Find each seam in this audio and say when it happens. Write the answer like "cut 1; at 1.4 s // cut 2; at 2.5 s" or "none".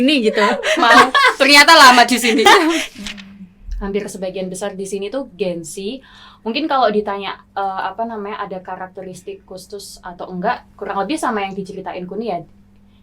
cut 1; at 2.8 s